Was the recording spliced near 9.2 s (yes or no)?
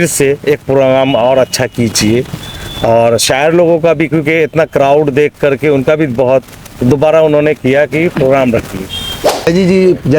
yes